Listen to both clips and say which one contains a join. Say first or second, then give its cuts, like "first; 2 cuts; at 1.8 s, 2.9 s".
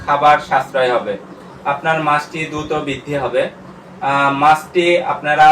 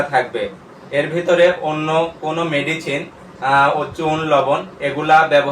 first; 1 cut; at 1.5 s